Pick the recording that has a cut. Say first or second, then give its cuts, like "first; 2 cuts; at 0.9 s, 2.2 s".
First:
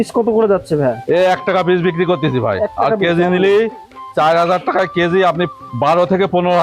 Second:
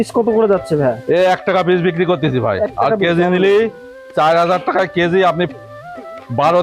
first; 1 cut; at 5.6 s